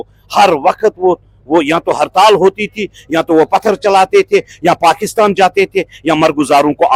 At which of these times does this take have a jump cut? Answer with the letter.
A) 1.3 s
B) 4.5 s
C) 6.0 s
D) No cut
D